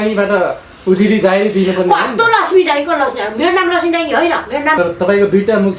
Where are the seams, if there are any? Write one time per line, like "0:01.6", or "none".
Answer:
0:04.8